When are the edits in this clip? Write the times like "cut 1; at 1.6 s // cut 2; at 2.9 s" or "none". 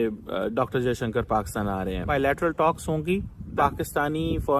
cut 1; at 2.1 s // cut 2; at 3.6 s